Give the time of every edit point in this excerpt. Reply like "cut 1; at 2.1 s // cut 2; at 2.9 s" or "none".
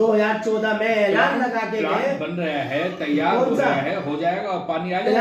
none